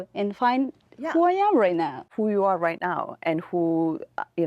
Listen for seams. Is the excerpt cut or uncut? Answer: cut